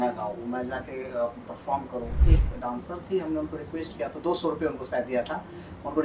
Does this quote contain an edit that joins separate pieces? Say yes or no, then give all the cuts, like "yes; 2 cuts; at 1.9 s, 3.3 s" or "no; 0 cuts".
yes; 1 cut; at 2.2 s